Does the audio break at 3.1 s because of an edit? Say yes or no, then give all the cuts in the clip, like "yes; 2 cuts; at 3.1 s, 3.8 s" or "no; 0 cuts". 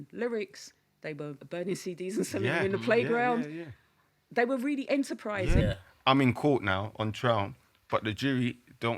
no; 2 cuts; at 1.4 s, 5.6 s